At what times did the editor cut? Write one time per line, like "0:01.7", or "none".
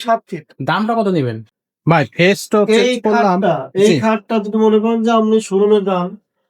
0:01.7

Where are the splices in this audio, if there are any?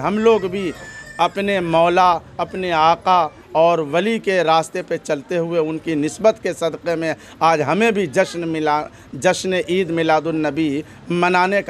none

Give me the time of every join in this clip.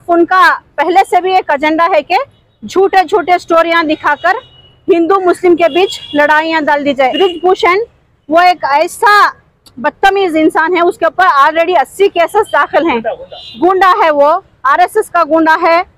0:07.1

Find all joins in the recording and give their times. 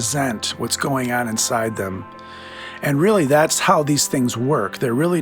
0:03.6

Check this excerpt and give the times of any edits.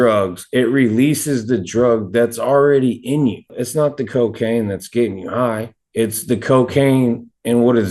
none

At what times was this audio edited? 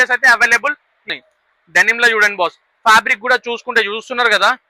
0:01.1

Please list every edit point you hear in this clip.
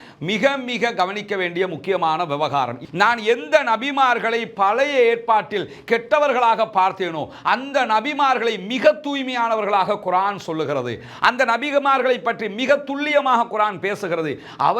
0:02.8

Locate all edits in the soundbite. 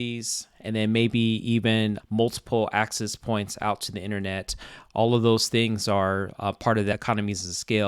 0:02.0
0:06.9

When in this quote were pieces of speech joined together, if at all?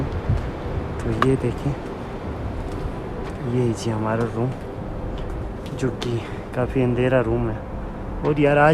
none

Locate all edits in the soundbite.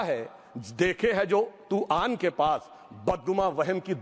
none

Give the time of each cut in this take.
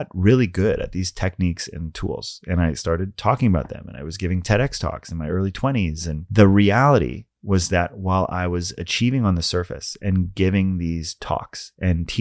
0:06.2

